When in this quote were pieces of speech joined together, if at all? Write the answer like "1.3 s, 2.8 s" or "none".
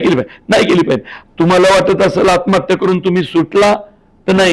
1.2 s